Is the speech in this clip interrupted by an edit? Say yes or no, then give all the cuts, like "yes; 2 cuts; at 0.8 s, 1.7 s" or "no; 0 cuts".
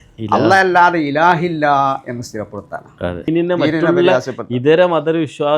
yes; 1 cut; at 3.3 s